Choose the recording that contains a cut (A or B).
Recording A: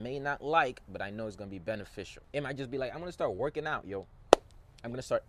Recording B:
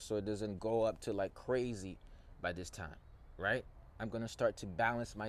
A